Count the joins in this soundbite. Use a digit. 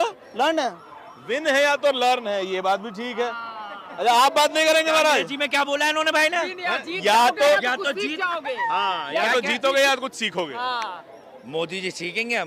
0